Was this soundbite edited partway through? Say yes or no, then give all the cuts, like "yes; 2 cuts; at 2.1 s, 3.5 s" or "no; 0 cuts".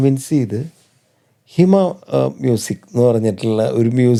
no; 0 cuts